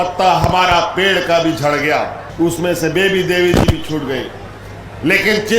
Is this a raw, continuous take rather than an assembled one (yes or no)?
no